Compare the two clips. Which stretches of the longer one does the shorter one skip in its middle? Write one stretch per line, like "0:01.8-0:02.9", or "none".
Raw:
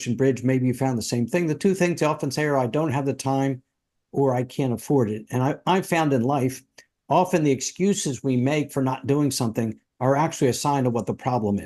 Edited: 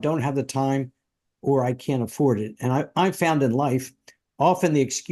none

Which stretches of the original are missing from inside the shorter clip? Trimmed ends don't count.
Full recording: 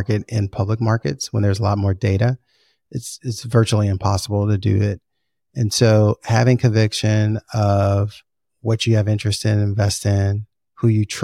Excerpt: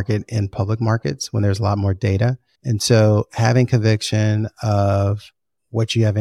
0:02.5-0:05.4

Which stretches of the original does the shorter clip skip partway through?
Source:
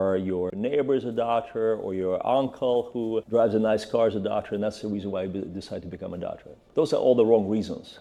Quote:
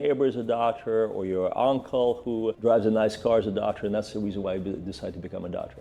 none

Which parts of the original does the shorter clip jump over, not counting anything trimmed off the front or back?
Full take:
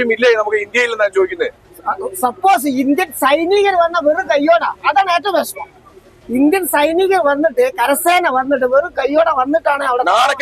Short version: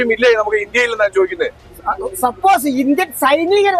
none

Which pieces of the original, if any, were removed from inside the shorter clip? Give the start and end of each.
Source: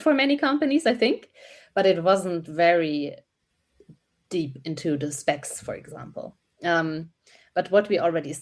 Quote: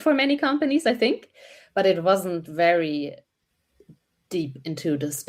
none

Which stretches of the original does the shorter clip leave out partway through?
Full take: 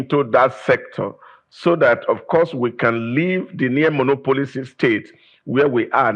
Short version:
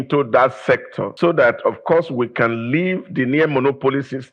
0:01.0-0:01.4

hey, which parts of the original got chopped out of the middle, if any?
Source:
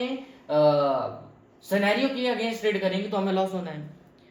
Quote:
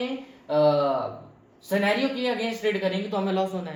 none

